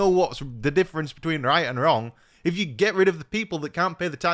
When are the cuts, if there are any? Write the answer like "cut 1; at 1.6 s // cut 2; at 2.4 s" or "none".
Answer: cut 1; at 2.2 s